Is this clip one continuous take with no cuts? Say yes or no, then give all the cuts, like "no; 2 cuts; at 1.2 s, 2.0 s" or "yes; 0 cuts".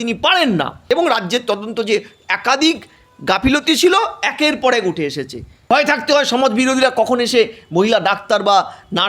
no; 2 cuts; at 0.8 s, 5.6 s